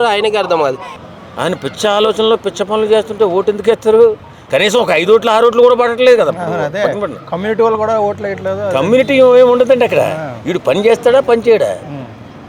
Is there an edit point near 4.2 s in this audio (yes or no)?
no